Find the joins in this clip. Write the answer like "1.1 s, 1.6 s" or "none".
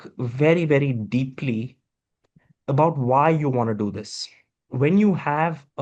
4.7 s